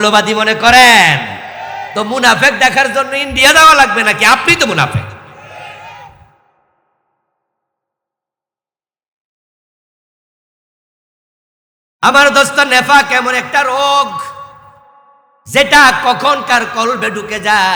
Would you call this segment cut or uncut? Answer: uncut